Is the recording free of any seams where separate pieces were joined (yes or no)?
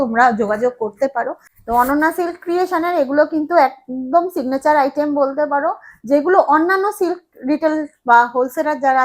no